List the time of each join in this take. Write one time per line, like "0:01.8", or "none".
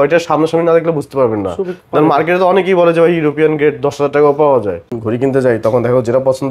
0:04.9